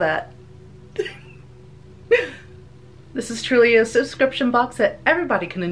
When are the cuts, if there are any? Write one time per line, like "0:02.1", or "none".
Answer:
none